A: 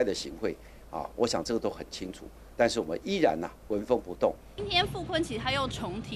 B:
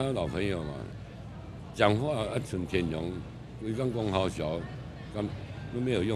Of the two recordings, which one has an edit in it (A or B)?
A